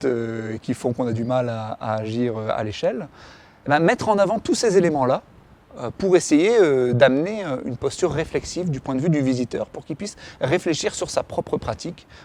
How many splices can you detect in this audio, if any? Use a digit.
0